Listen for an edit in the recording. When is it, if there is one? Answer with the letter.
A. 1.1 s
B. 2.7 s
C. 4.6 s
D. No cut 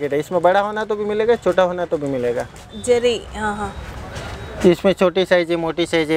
B